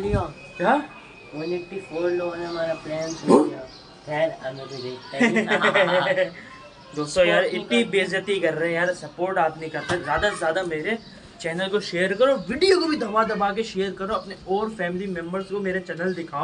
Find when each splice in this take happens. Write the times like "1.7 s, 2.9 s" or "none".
none